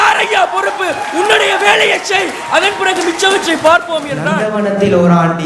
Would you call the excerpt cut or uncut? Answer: cut